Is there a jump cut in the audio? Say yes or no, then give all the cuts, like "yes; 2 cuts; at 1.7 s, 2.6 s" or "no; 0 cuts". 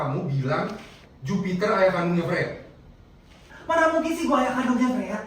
yes; 1 cut; at 3.5 s